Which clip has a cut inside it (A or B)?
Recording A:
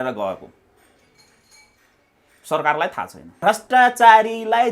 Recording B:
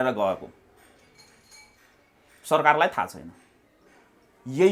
A